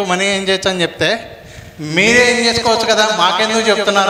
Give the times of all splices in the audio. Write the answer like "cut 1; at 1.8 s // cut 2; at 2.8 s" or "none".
none